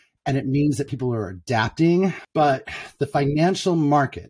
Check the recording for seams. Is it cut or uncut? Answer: cut